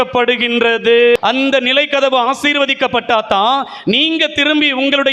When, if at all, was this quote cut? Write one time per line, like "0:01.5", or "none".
0:01.2